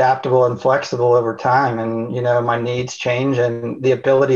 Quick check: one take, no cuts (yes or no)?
yes